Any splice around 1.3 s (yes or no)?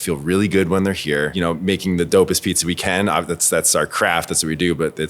yes